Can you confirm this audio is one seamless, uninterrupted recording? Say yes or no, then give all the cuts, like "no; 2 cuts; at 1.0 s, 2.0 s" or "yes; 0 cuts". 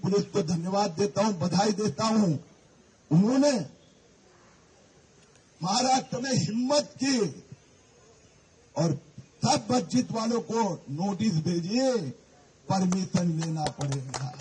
yes; 0 cuts